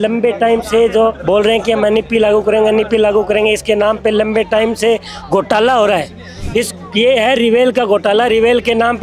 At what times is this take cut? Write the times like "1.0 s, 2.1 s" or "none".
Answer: none